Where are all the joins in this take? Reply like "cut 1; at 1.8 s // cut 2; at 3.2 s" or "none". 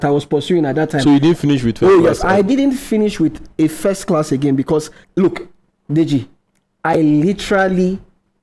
cut 1; at 5.0 s